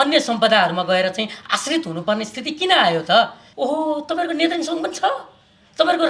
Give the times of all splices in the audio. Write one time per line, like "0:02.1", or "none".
0:03.4